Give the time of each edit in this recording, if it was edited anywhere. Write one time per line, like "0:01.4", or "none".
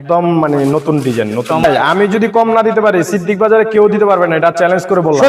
0:01.6